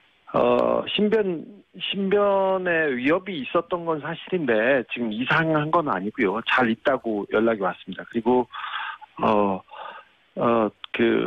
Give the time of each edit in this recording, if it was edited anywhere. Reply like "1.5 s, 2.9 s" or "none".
none